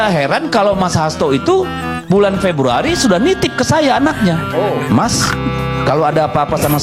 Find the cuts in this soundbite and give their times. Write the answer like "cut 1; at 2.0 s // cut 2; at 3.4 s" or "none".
none